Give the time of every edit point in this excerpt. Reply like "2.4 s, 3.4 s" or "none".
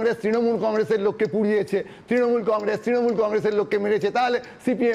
none